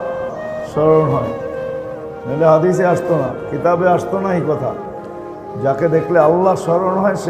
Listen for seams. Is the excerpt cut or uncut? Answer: uncut